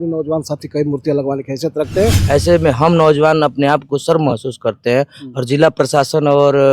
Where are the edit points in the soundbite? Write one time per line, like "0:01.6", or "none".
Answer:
0:02.2